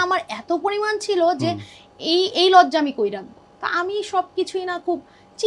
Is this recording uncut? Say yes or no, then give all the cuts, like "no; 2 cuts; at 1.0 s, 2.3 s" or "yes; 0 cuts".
no; 1 cut; at 3.4 s